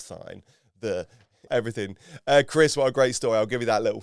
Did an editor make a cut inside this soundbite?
yes; 1 cut; at 1.5 s

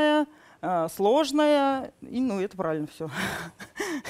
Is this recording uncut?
yes; 0 cuts

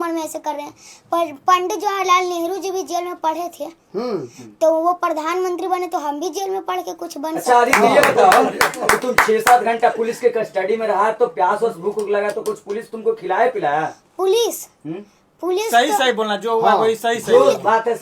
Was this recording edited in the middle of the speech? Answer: no; 0 cuts

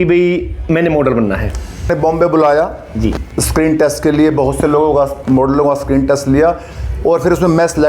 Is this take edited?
yes; 1 cut; at 1.9 s

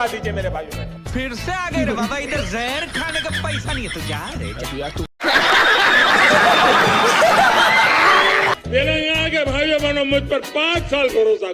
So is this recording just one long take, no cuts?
no; 1 cut; at 8.6 s

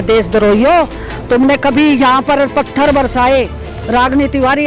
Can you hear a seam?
no; 0 cuts

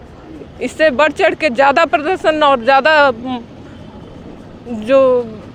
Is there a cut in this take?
no; 0 cuts

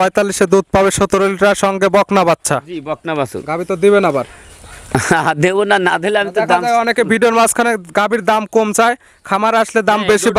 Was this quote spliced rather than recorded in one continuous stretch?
no; 0 cuts

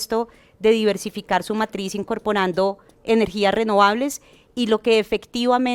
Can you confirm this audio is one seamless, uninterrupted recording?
yes; 0 cuts

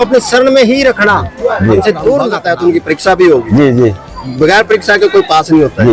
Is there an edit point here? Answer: yes; 1 cut; at 2.4 s

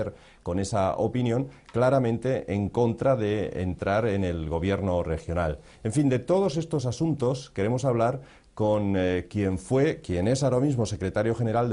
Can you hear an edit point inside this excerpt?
no; 0 cuts

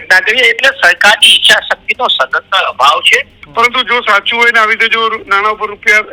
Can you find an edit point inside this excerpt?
yes; 1 cut; at 3.4 s

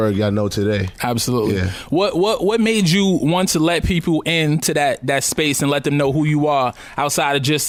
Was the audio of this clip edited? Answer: no; 0 cuts

